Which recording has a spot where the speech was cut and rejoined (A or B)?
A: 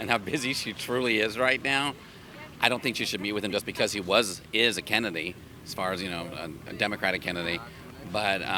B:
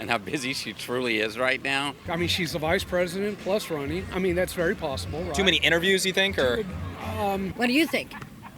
B